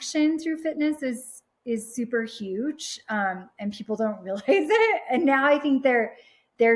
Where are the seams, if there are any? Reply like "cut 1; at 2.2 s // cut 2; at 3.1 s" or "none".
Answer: none